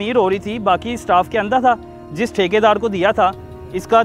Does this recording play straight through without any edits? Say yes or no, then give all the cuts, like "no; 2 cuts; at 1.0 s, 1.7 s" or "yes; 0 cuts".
yes; 0 cuts